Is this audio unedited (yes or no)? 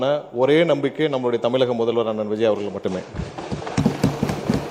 yes